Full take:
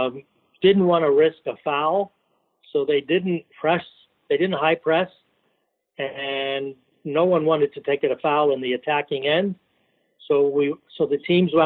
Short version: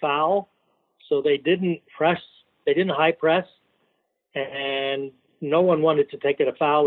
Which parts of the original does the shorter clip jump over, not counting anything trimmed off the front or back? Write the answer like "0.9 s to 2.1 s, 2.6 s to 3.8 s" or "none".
none